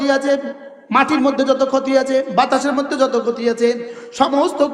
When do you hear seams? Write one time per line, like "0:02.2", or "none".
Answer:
none

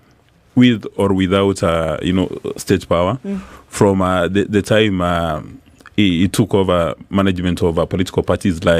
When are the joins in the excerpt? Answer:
none

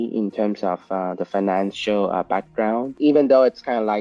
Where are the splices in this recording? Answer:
0:02.9

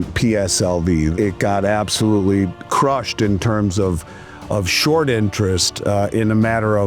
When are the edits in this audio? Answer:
0:01.1
0:02.5

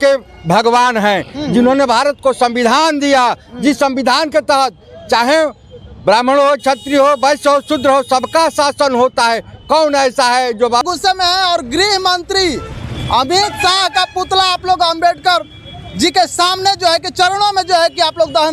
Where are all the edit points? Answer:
0:10.8

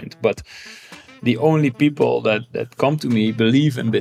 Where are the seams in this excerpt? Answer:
none

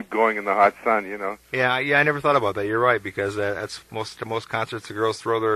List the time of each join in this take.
0:01.0

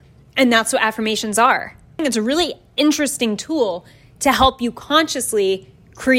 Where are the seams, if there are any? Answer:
0:02.0

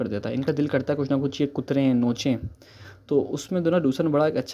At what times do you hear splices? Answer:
none

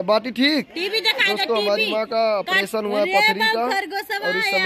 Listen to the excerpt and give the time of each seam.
none

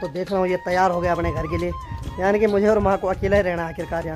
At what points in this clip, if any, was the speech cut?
none

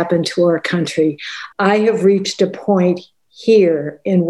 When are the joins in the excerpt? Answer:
0:01.4

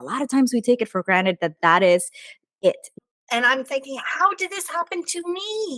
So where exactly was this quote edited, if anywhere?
0:02.9

